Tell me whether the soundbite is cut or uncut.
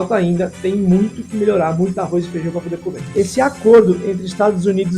cut